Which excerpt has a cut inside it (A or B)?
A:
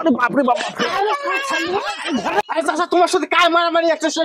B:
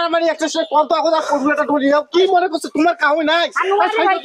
A